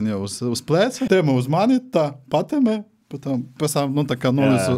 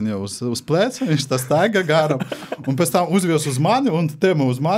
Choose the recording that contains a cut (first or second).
first